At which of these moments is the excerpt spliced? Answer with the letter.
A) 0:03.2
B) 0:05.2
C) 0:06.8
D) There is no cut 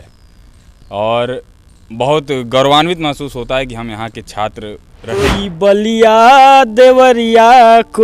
B